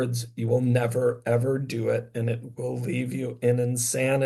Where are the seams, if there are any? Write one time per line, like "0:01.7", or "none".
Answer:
none